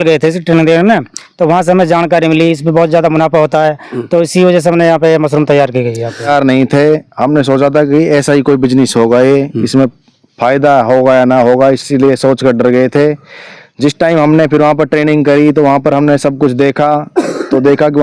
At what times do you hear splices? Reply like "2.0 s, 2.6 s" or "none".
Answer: 6.2 s

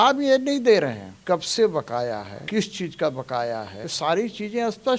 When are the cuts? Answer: 1.1 s, 2.3 s, 3.8 s

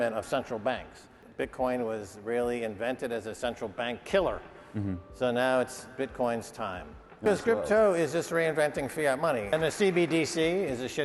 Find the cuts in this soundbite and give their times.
1.1 s, 7.2 s

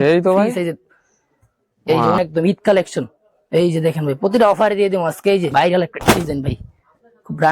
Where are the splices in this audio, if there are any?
2.2 s, 5.5 s

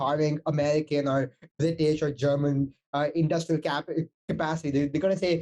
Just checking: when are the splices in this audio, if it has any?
none

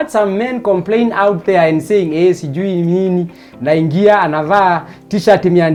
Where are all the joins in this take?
none

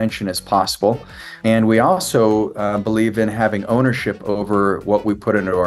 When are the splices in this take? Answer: 1.3 s

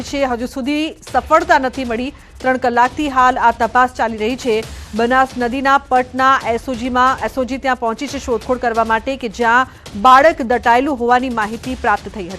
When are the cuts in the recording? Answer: 9.8 s

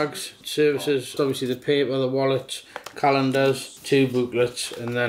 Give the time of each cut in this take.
1.1 s

